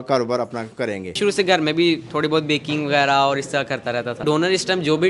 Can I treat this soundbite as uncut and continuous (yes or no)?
no